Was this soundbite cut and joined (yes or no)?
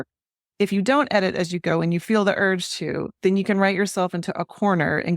no